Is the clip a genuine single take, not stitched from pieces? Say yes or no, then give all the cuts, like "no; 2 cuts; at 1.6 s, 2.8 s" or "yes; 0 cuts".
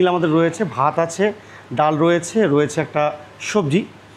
yes; 0 cuts